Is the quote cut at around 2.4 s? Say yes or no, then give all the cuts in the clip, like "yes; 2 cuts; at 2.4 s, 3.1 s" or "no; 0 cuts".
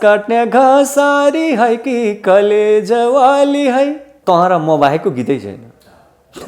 no; 1 cut; at 4.1 s